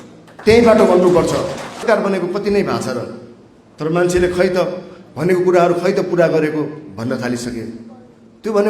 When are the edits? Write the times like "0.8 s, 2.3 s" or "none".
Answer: 1.8 s